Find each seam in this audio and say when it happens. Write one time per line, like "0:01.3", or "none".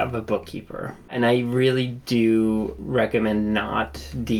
0:01.1
0:02.8